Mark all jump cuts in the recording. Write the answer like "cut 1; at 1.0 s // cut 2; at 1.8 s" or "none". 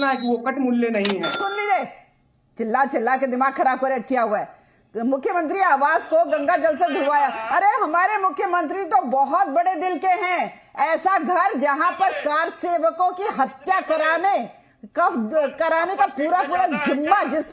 cut 1; at 1.3 s